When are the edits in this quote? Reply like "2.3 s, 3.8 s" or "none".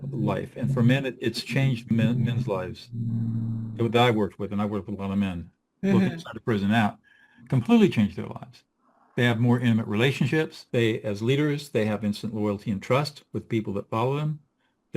1.8 s, 10.6 s